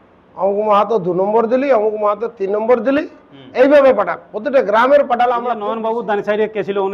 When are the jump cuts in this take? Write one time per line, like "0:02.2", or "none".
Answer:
0:05.9